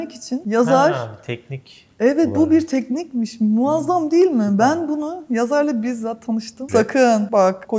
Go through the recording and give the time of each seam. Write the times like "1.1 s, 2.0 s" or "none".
6.5 s